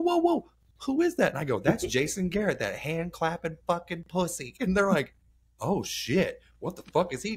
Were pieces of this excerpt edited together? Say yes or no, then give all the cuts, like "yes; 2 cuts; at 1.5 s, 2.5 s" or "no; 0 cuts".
no; 0 cuts